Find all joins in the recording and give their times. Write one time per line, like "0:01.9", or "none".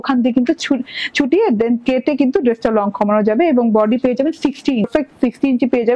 0:04.9